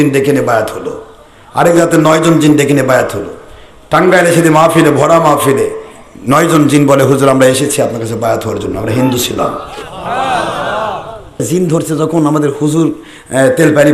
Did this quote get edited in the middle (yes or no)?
yes